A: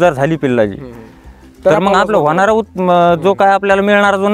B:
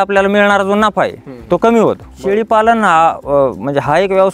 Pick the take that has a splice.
B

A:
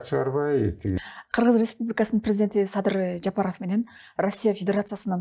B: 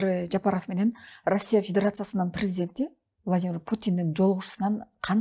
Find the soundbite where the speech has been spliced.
A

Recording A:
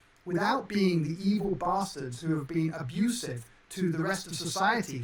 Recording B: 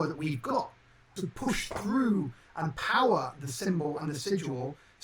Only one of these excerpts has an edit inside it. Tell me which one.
B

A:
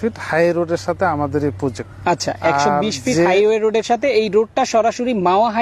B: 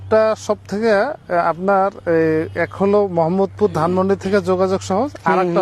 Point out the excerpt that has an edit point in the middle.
A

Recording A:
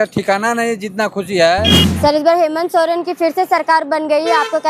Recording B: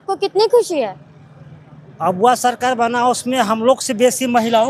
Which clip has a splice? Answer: A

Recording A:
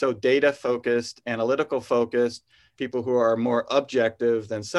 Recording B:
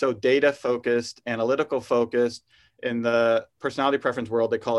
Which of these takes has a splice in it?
A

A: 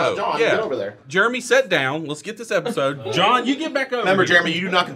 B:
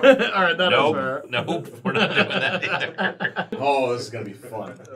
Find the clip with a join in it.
B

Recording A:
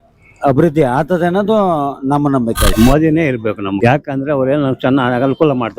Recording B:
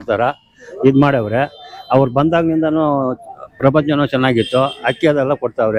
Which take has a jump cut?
A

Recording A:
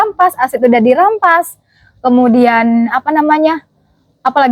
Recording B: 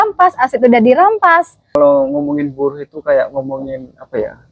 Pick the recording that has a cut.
B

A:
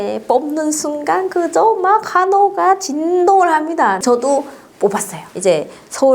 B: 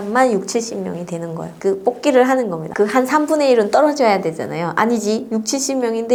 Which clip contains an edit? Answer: A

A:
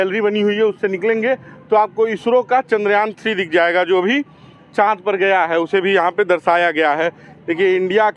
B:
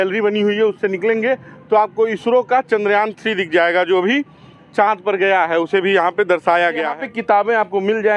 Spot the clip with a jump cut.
B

